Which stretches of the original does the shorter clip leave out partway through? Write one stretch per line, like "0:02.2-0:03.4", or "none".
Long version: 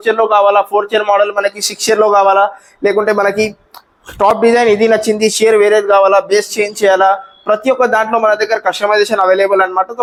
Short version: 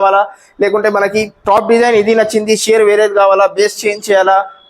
0:03.6-0:04.1

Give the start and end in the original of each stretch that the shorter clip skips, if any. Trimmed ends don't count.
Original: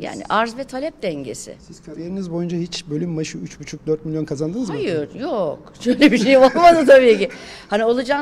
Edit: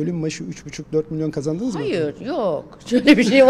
none

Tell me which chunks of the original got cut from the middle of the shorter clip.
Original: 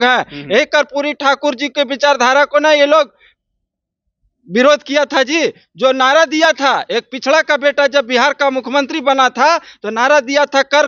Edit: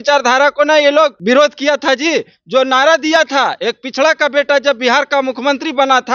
0:03.1-0:04.5

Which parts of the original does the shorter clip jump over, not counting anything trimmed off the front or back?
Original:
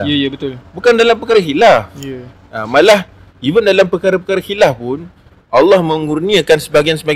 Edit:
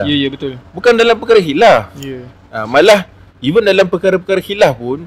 none

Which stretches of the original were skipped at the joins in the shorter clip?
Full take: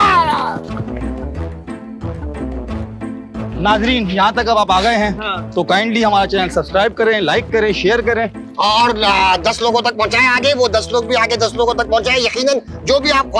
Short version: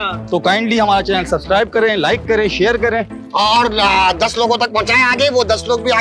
none

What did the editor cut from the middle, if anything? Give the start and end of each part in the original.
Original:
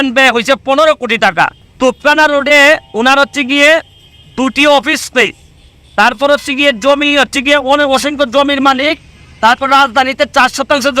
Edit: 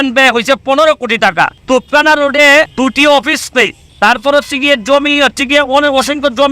0:01.6-0:01.7
0:02.8-0:04.3
0:05.4-0:05.8

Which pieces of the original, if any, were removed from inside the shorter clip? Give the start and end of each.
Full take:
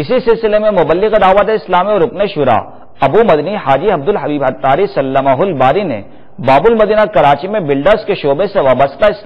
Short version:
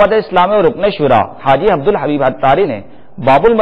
0:02.7-0:03.6
0:04.9-0:05.9

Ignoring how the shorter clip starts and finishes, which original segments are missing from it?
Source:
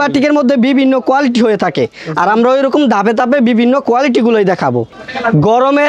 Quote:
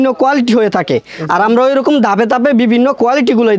none

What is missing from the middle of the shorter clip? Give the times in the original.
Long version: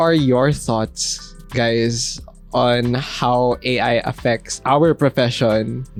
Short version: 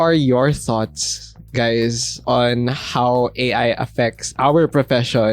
0:02.1-0:02.4

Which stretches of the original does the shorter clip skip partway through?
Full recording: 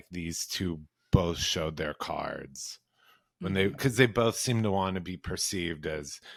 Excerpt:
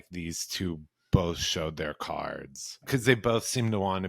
0:02.8-0:03.8

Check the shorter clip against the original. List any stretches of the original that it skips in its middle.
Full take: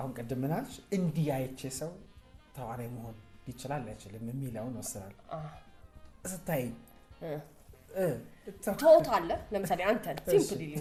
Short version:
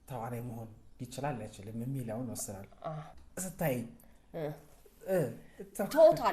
0:05.6-0:06.0

